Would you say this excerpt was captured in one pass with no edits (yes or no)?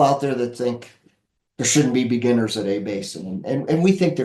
yes